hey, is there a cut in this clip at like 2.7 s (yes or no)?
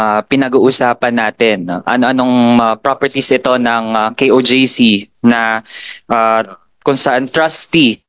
no